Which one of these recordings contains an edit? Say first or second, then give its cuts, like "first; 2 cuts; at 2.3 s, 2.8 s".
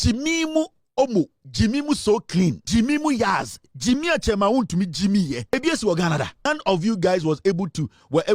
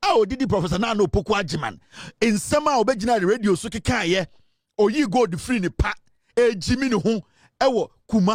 first; 3 cuts; at 2.6 s, 5.5 s, 6.5 s